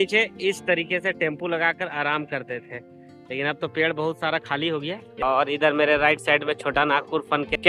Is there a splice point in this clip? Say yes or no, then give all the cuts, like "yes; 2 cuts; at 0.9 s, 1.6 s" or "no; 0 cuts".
yes; 1 cut; at 5.1 s